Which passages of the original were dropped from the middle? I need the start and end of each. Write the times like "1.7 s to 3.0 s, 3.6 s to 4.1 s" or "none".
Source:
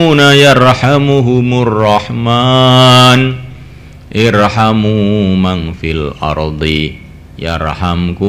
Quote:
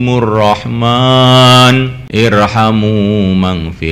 3.4 s to 4.0 s